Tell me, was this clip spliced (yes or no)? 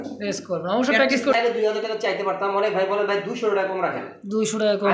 yes